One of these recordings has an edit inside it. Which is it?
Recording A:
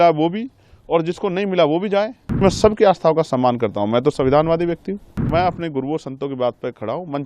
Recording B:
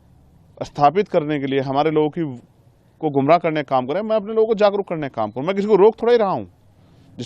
A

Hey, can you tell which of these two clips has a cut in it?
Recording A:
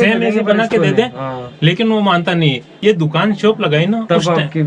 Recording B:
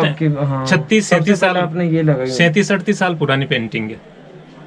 A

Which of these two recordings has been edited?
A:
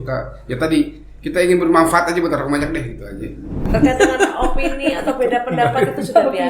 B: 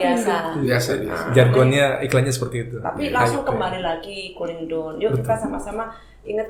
A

